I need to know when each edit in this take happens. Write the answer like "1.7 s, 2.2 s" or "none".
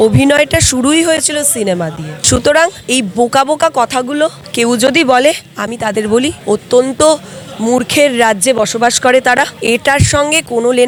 none

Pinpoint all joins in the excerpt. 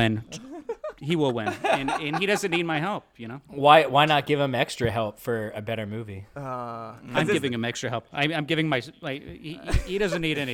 none

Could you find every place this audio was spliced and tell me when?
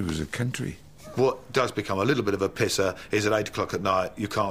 1.1 s

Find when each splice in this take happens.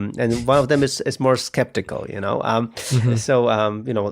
3.1 s

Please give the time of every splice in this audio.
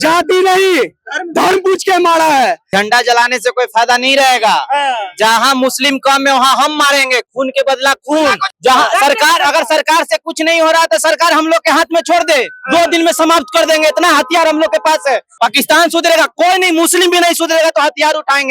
2.6 s, 8.5 s, 15.3 s

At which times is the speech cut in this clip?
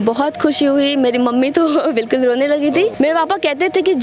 2.9 s

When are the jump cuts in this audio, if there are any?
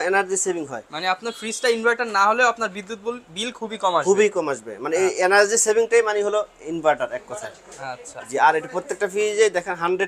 none

